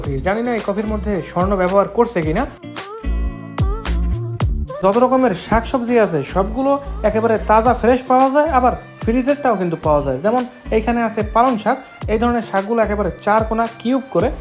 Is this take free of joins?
no; 1 cut; at 4.8 s

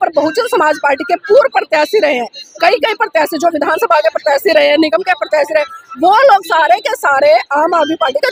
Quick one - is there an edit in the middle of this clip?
no; 0 cuts

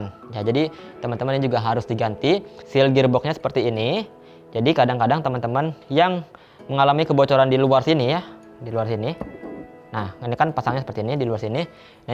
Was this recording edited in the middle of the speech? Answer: yes; 1 cut; at 2.6 s

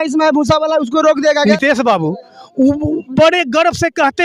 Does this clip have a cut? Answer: yes; 1 cut; at 1.4 s

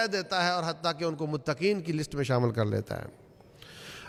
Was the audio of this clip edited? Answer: no; 0 cuts

